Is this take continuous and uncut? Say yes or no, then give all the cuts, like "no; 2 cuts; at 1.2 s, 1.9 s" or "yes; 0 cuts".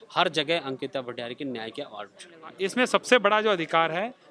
no; 1 cut; at 2.4 s